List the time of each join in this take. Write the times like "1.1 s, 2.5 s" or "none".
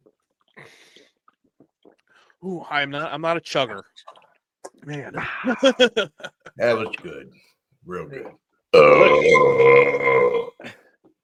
none